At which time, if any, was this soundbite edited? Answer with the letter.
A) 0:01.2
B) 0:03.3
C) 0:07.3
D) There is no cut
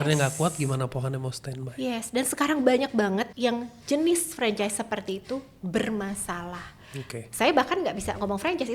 B